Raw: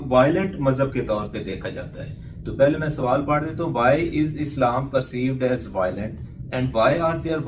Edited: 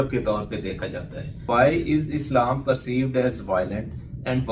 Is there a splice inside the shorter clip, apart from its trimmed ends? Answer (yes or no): yes